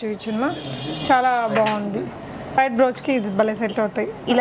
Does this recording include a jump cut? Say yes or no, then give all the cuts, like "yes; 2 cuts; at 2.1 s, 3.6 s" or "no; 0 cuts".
yes; 1 cut; at 2.6 s